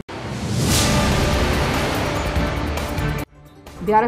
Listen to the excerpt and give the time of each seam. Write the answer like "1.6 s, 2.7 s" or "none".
none